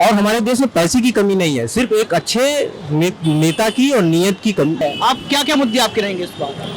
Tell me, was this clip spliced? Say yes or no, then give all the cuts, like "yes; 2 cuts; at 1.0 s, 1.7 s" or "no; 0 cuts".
yes; 1 cut; at 4.8 s